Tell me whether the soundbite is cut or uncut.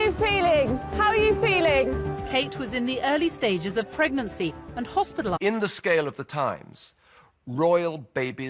uncut